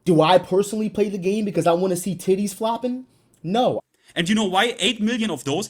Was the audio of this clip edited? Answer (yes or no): yes